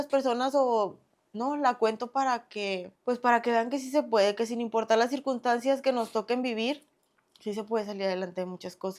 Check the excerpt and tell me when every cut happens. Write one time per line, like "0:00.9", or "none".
0:02.9